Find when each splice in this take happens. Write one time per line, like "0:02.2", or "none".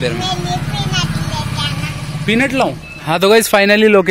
0:02.9

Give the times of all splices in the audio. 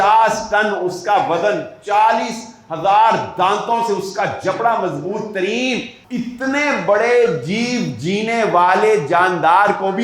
0:06.0

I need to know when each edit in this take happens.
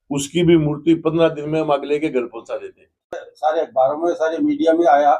0:03.2

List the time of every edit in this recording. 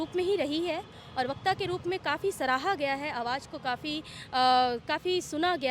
none

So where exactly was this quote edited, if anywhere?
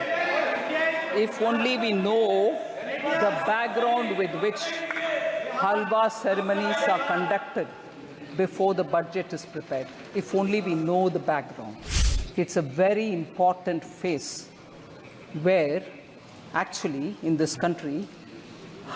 0:11.8

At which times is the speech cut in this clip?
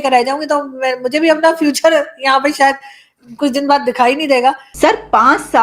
0:04.7

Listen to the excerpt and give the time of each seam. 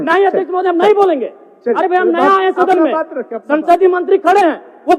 none

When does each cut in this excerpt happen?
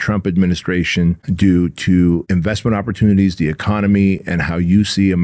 0:01.2
0:02.3

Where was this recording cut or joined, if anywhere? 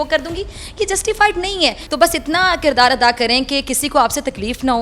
0:01.8

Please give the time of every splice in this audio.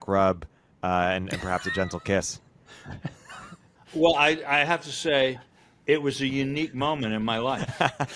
0:03.7

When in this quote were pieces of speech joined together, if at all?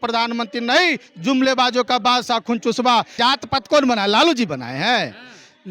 0:03.1

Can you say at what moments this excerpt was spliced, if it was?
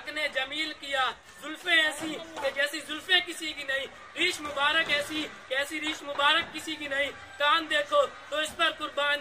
0:01.3

